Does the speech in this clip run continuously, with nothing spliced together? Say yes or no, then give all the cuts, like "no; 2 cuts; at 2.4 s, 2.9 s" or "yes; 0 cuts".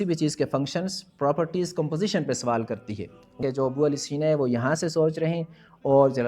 no; 1 cut; at 3.4 s